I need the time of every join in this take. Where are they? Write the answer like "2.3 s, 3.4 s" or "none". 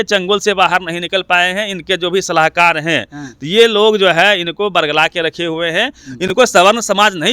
none